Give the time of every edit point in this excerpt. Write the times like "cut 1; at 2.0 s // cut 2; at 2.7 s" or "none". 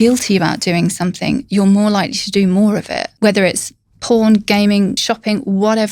cut 1; at 3.0 s // cut 2; at 5.0 s